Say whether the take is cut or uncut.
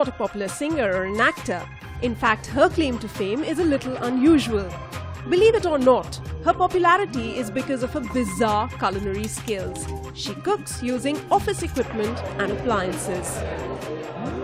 uncut